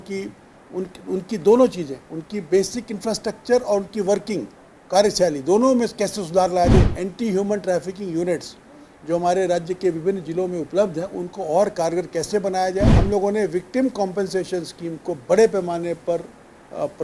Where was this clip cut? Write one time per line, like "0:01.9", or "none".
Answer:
0:06.9
0:13.0